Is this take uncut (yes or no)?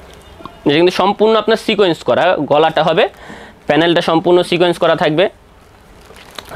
yes